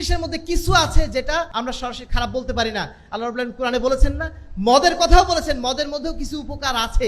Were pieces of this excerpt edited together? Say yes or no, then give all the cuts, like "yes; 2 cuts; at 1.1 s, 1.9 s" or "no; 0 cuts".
yes; 1 cut; at 1.5 s